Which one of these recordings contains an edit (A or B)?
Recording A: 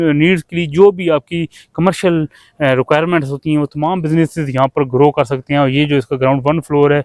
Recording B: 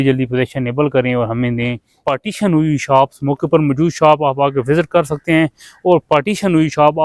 B